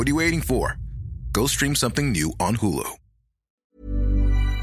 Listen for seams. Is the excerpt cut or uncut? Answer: cut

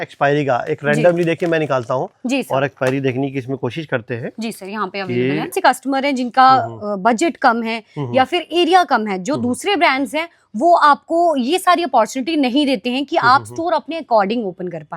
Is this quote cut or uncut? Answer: cut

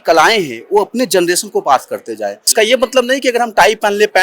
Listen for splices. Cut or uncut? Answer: cut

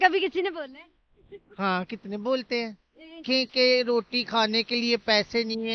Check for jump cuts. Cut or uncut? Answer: cut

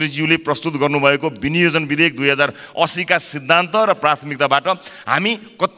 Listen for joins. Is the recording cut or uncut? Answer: uncut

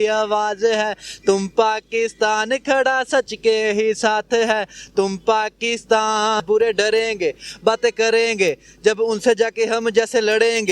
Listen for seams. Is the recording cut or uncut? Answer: cut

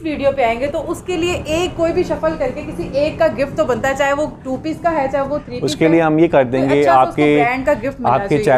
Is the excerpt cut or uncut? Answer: uncut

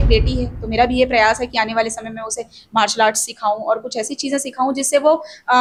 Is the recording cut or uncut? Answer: uncut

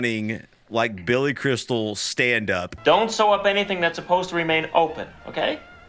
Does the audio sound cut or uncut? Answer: cut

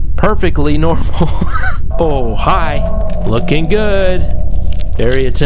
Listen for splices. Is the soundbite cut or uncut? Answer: cut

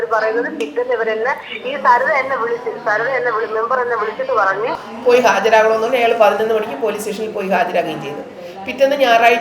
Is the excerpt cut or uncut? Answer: cut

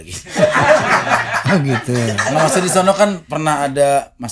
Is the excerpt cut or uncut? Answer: uncut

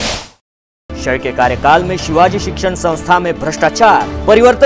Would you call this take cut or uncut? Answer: cut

